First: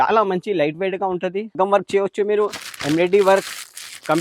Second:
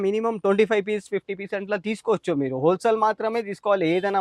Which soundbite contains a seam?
first; 1 cut; at 1.5 s

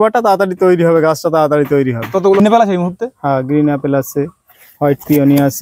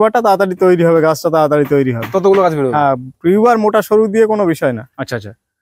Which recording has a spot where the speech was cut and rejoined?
first; 1 cut; at 2.4 s

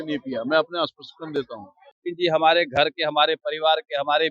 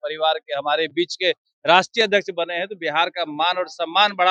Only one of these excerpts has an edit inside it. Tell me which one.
first; 1 cut; at 1.9 s

